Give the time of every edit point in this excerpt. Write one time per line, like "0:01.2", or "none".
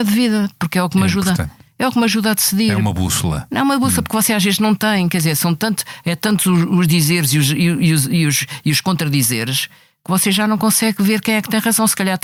none